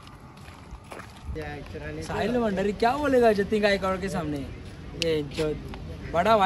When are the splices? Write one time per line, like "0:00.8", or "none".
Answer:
0:01.3